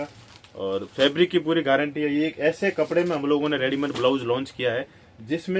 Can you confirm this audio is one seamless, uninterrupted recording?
yes; 0 cuts

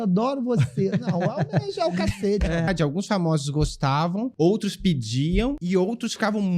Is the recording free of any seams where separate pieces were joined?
no; 3 cuts; at 2.7 s, 4.3 s, 5.6 s

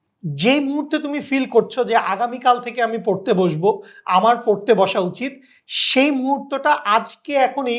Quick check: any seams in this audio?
no; 0 cuts

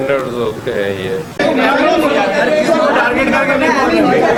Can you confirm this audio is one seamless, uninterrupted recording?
yes; 0 cuts

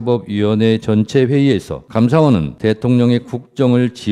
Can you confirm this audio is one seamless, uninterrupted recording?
no; 2 cuts; at 1.8 s, 2.5 s

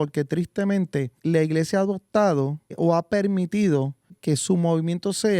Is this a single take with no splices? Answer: no; 3 cuts; at 1.1 s, 2.7 s, 4.2 s

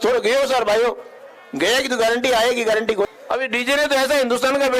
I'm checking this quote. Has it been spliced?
yes; 1 cut; at 3.1 s

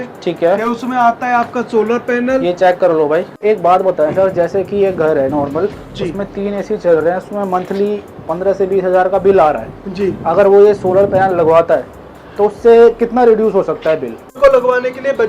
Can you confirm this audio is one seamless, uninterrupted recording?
no; 2 cuts; at 3.4 s, 14.4 s

